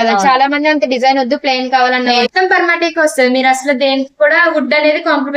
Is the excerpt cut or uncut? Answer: cut